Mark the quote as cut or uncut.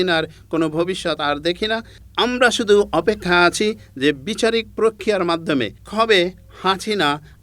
cut